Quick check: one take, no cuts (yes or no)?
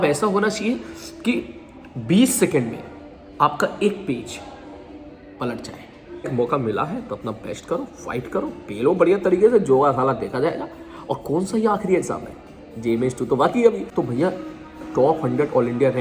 no